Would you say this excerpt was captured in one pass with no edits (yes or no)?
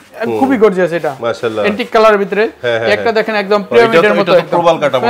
yes